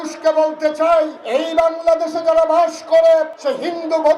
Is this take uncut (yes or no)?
no